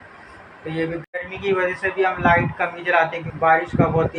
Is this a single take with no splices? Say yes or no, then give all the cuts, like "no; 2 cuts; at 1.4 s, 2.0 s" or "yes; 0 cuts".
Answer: no; 2 cuts; at 1.0 s, 3.2 s